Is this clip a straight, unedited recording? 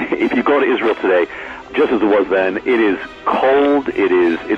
no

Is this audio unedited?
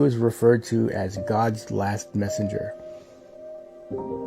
no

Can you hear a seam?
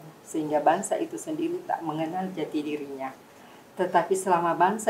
no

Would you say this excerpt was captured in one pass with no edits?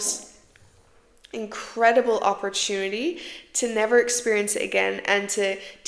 yes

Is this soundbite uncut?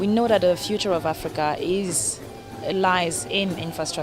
yes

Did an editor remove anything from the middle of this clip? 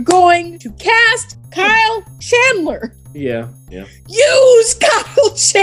yes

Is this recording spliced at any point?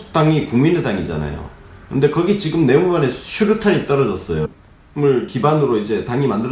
no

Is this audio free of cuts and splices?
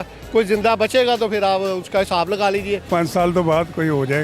no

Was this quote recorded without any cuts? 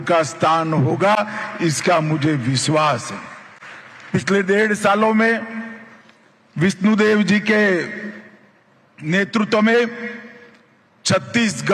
yes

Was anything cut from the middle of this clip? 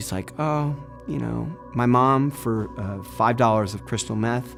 no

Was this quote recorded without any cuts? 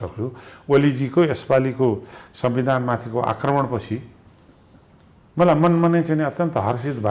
yes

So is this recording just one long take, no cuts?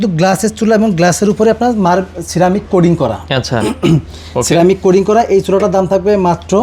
yes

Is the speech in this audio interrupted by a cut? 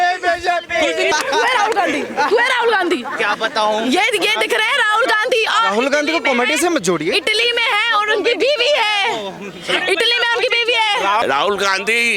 yes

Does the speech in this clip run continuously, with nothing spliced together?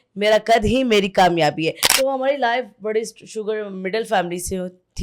no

